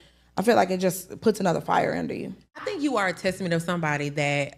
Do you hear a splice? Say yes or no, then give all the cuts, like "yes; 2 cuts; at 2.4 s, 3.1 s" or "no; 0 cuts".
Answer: yes; 1 cut; at 2.6 s